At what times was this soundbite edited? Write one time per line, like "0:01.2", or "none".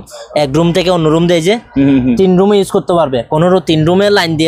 none